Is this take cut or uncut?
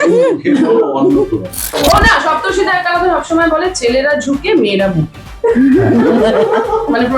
cut